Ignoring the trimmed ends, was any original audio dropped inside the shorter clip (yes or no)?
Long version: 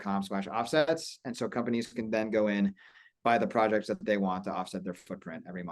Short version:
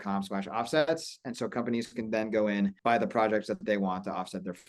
yes